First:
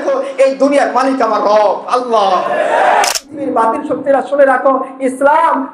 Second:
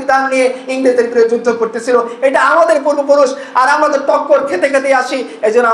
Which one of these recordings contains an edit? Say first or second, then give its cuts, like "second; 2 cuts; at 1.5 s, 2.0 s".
first; 1 cut; at 3.1 s